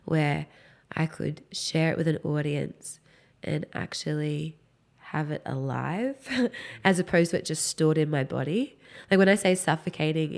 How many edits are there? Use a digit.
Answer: 0